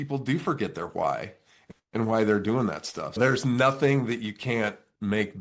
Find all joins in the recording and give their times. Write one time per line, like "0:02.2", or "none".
0:03.2